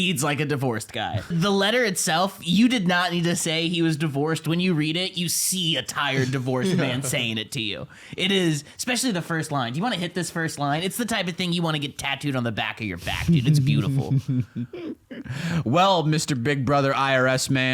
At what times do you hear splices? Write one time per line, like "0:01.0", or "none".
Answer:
0:01.3